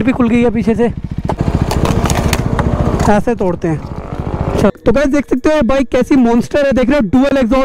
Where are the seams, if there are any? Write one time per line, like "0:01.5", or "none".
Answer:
0:01.4
0:04.7